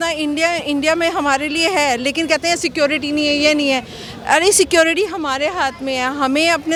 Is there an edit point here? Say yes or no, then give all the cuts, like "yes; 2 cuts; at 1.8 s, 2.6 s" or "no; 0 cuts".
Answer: no; 0 cuts